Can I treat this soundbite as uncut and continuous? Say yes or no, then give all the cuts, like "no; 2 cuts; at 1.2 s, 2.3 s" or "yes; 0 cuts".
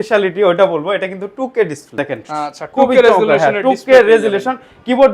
no; 1 cut; at 2.0 s